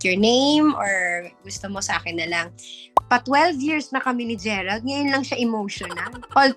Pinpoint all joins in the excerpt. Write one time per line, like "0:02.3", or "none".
0:02.9

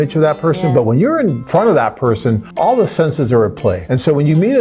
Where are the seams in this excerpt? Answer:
0:01.4
0:02.5
0:03.8

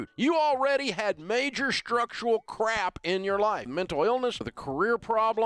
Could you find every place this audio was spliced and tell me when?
0:03.7
0:04.5

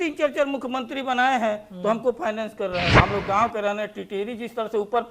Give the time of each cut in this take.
0:02.9

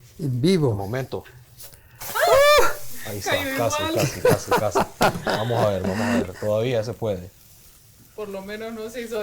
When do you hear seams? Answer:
0:04.3

